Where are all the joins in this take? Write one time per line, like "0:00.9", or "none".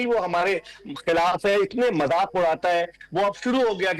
0:02.3